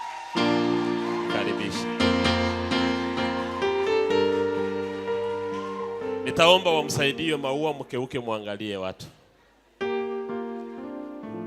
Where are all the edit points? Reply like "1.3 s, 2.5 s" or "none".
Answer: none